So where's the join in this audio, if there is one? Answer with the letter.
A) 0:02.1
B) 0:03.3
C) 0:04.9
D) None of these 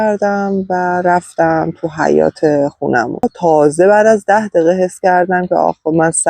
B